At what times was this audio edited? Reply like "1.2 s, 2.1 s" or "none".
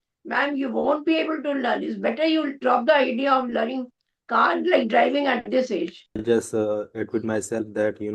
6.2 s

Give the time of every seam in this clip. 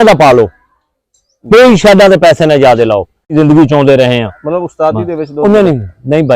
3.3 s

